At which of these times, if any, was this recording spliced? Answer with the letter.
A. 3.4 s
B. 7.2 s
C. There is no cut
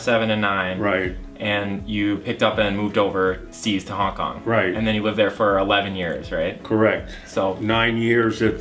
C